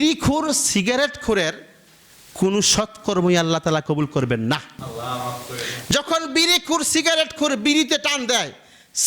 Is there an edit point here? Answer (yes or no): no